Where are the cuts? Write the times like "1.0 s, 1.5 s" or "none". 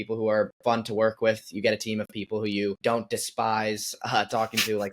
2.8 s